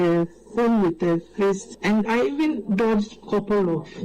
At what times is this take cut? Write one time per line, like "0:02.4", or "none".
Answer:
0:02.1